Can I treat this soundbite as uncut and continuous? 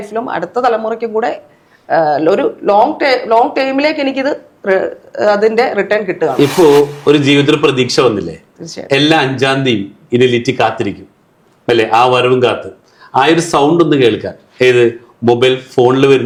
yes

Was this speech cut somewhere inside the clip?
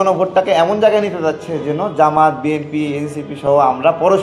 no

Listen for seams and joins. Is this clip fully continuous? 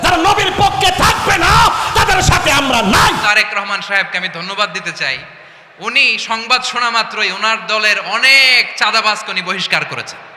no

